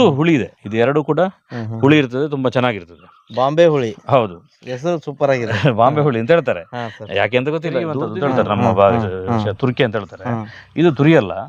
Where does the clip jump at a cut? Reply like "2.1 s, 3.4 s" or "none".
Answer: 8.0 s